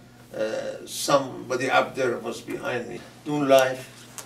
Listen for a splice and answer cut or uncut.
uncut